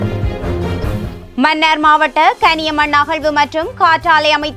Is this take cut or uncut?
cut